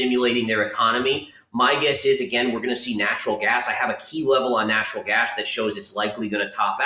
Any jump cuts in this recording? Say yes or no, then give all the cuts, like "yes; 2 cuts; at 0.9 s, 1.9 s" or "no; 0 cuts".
no; 0 cuts